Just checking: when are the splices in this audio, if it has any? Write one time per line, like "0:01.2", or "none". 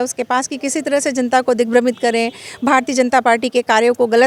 none